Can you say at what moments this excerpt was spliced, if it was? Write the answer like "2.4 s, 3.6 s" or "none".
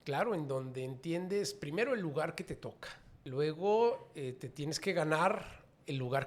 3.2 s